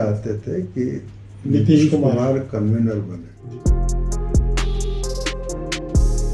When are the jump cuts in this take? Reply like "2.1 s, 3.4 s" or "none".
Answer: 3.3 s